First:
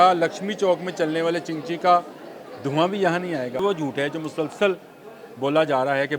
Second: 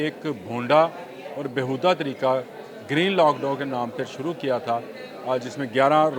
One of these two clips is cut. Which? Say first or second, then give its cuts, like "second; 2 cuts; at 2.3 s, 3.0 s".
first; 1 cut; at 3.6 s